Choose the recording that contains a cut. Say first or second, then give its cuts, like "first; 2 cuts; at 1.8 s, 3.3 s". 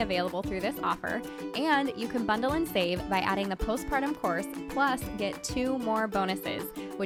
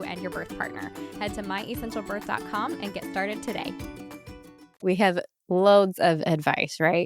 second; 1 cut; at 4.8 s